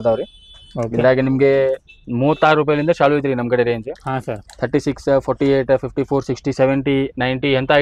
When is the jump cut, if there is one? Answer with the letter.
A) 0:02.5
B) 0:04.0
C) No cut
C